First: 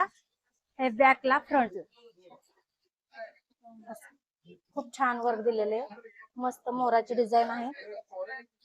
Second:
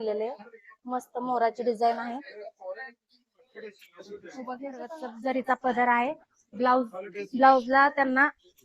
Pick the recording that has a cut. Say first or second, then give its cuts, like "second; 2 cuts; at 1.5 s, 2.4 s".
second; 1 cut; at 5.0 s